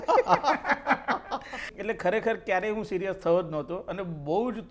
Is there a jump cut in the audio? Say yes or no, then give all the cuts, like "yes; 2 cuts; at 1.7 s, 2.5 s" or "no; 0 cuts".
yes; 1 cut; at 1.7 s